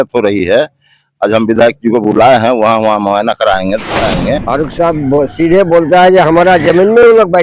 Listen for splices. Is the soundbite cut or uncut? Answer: cut